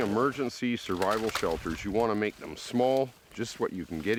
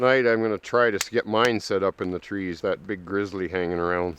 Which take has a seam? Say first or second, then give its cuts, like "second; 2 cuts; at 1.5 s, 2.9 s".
second; 1 cut; at 2.6 s